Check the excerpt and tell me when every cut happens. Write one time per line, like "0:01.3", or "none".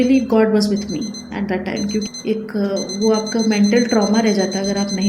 0:02.1